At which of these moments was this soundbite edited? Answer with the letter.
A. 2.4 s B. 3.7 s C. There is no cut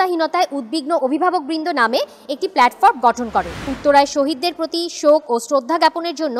B